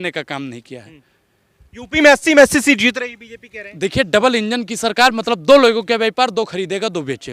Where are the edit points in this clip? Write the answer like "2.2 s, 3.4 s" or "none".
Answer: none